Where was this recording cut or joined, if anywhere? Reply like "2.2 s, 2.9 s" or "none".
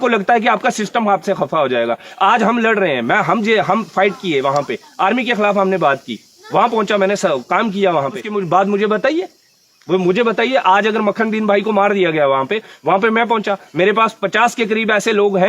8.3 s